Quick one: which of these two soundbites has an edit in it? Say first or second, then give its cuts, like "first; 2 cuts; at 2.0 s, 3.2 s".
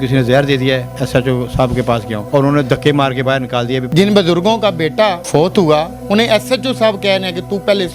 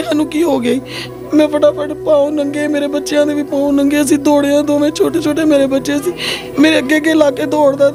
first; 4 cuts; at 0.9 s, 2.2 s, 3.9 s, 5.2 s